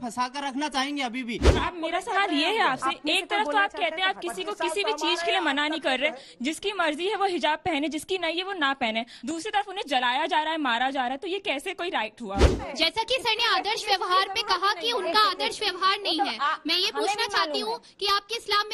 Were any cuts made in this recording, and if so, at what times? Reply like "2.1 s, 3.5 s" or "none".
1.6 s, 9.1 s, 12.7 s